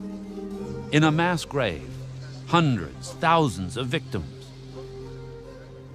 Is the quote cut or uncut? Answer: cut